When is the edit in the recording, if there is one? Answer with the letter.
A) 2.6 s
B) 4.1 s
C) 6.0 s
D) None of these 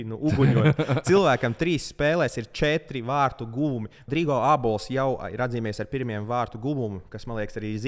B